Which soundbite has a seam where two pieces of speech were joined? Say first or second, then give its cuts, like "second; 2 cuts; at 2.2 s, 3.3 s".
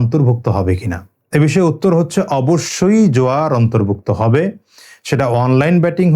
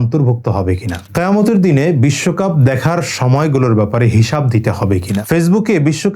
second; 2 cuts; at 1.0 s, 5.2 s